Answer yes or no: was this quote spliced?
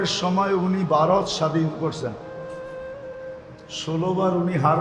yes